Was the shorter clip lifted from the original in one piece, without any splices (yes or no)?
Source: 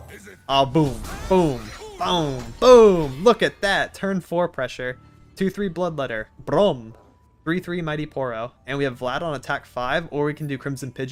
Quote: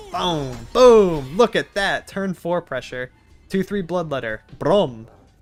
yes